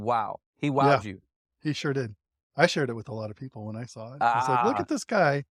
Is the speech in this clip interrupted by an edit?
no; 0 cuts

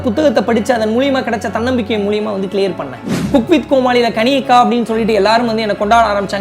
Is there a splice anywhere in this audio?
yes; 1 cut; at 3.2 s

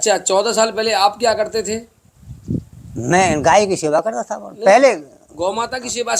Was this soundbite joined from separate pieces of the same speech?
no; 0 cuts

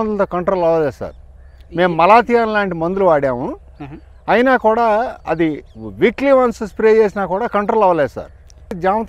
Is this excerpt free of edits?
yes; 0 cuts

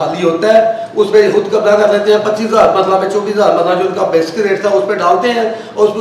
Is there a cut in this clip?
no; 0 cuts

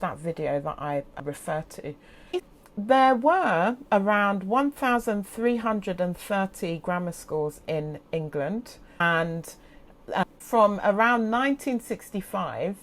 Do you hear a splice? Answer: yes; 3 cuts; at 2.5 s, 9.0 s, 10.4 s

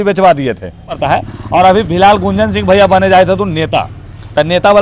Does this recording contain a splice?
yes; 1 cut; at 1.0 s

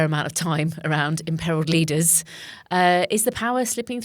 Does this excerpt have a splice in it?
no; 0 cuts

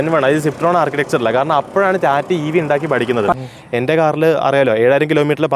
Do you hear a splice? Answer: yes; 1 cut; at 3.3 s

